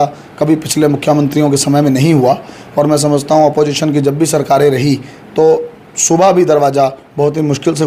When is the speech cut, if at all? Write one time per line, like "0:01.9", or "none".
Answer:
none